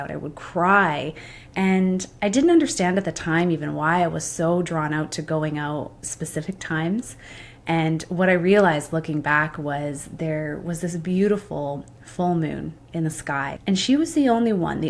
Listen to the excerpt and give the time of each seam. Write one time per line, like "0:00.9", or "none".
0:13.5